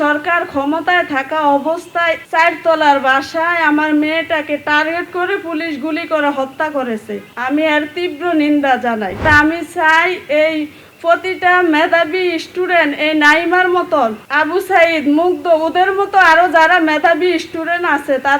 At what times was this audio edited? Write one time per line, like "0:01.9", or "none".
0:02.2
0:09.2